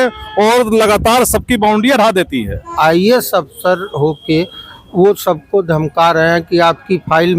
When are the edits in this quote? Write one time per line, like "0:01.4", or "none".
0:02.6